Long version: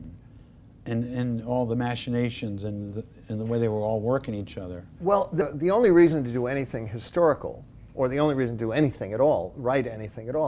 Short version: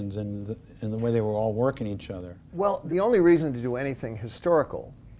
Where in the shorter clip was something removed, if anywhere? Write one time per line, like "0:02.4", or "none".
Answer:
0:02.8